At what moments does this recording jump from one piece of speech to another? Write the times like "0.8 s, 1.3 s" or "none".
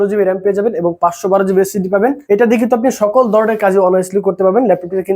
2.2 s